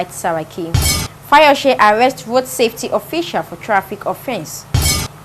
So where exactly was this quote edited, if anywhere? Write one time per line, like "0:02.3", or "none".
none